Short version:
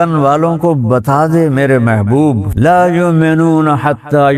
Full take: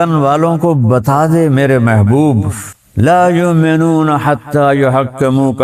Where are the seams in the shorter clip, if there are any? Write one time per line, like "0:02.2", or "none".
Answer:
0:02.5